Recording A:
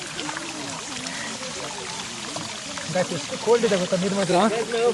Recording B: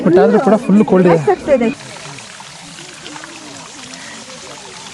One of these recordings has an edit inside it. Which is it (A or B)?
B